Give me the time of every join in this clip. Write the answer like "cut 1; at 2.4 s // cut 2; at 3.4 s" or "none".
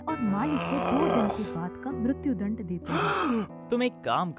cut 1; at 3.5 s